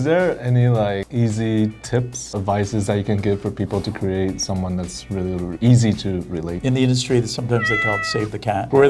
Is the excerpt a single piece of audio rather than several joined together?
no; 2 cuts; at 2.2 s, 6.5 s

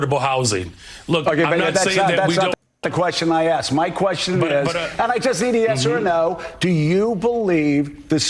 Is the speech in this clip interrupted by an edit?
yes; 1 cut; at 2.8 s

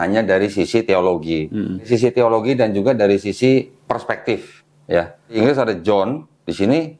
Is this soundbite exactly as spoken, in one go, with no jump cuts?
no; 2 cuts; at 1.8 s, 5.4 s

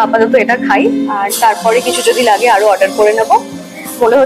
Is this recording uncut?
yes; 0 cuts

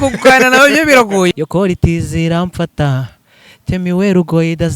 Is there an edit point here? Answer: yes; 1 cut; at 1.3 s

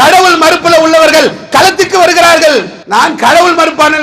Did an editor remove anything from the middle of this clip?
yes; 1 cut; at 2.8 s

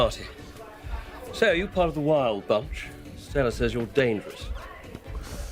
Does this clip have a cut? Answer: no; 0 cuts

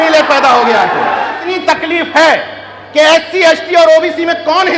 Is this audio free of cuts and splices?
no; 1 cut; at 1.4 s

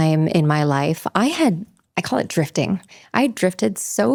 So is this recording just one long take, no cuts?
yes; 0 cuts

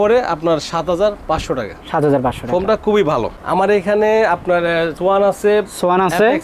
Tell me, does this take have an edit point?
yes; 1 cut; at 3.3 s

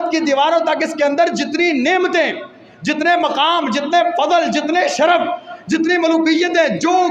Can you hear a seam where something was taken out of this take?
no; 0 cuts

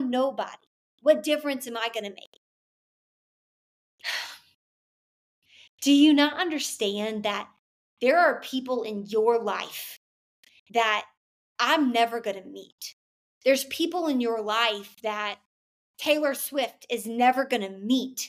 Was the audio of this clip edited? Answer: no; 0 cuts

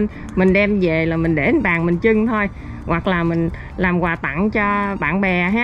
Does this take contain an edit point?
no; 0 cuts

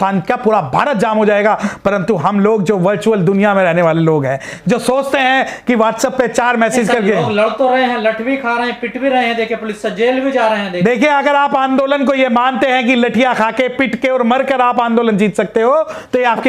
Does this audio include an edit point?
no; 0 cuts

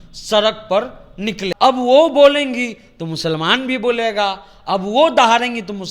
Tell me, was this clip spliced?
yes; 1 cut; at 1.5 s

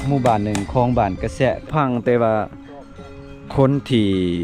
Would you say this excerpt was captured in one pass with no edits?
no; 1 cut; at 1.6 s

